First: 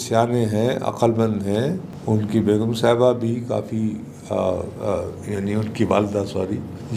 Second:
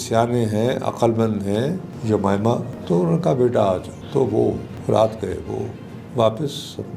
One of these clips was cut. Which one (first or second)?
second